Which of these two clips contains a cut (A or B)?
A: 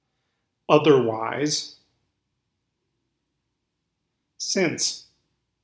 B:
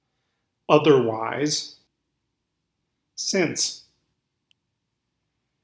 B